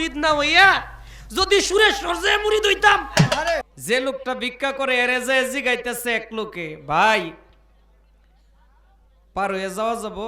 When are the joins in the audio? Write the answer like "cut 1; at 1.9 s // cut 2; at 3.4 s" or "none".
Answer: cut 1; at 3.6 s